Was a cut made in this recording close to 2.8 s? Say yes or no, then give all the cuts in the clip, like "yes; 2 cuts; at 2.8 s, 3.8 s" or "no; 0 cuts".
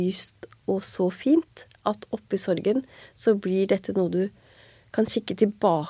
no; 0 cuts